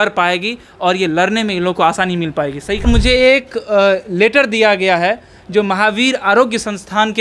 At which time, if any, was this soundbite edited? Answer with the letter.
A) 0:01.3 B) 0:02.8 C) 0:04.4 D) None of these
B